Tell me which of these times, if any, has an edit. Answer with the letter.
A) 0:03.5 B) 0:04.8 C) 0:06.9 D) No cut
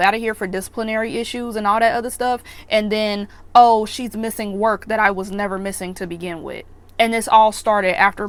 D